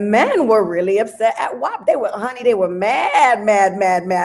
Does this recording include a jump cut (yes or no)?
no